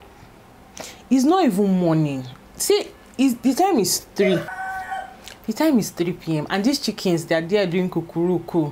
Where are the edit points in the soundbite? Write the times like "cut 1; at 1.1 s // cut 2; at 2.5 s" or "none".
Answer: cut 1; at 4.5 s